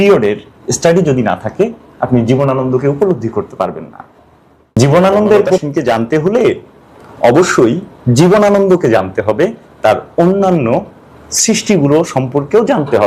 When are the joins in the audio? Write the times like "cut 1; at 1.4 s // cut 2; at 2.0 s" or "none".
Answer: cut 1; at 4.8 s // cut 2; at 5.7 s